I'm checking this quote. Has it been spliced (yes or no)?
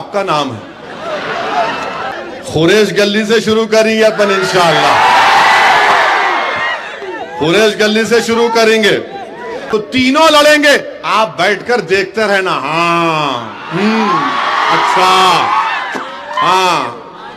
yes